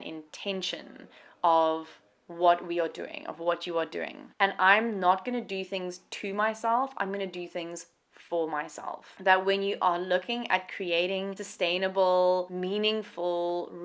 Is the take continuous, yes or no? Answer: no